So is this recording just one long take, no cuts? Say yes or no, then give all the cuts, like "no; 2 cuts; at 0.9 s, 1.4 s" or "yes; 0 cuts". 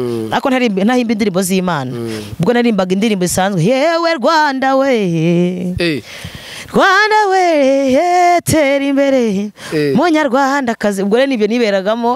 yes; 0 cuts